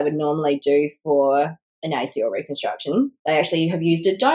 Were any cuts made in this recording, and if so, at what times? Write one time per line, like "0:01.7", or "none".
0:03.2